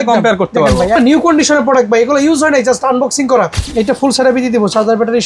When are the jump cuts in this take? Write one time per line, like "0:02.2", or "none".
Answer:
0:00.9
0:03.6